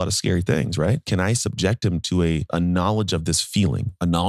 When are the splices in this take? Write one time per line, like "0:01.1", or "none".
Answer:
0:01.0
0:02.5